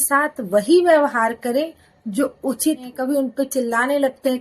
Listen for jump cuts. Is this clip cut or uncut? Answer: cut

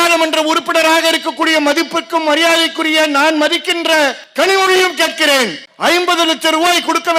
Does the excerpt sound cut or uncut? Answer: uncut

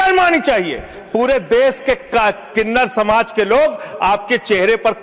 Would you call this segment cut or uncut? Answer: uncut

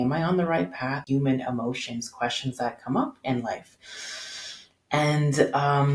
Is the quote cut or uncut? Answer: cut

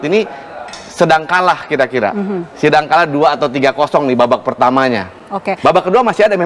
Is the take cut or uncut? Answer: uncut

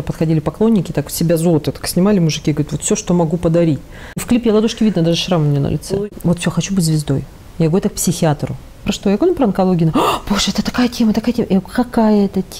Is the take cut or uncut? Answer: cut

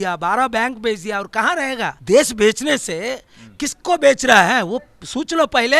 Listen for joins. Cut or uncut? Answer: uncut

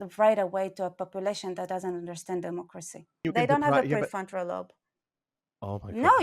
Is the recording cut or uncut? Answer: cut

